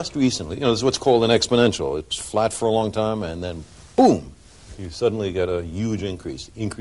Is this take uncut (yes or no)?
yes